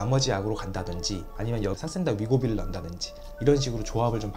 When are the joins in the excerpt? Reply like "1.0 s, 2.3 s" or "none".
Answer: none